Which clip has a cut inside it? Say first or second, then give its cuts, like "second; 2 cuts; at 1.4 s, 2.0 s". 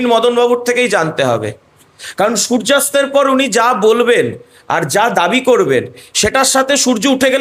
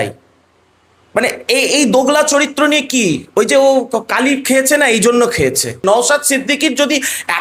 second; 1 cut; at 5.8 s